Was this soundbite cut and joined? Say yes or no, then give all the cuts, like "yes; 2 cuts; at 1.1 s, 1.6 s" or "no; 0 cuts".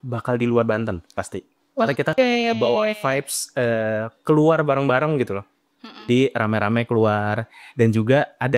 no; 0 cuts